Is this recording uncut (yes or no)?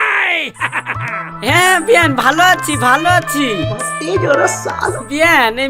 yes